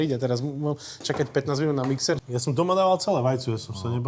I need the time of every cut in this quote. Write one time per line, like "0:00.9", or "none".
0:02.2